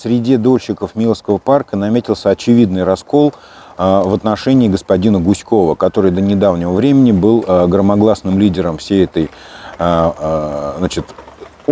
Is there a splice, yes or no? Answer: no